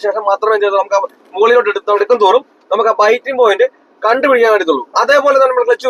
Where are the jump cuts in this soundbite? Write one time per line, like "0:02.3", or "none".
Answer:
none